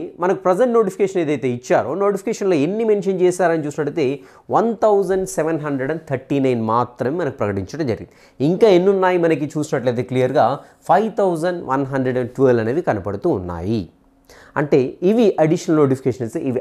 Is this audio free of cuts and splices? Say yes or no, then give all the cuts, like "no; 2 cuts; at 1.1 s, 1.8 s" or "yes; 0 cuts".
yes; 0 cuts